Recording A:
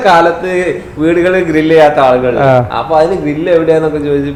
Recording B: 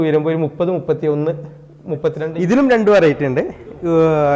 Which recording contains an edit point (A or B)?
B